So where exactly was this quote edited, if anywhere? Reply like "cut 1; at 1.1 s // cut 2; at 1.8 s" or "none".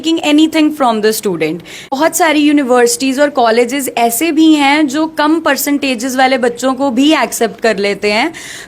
cut 1; at 1.9 s